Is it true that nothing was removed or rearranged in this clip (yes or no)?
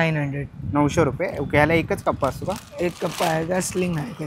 yes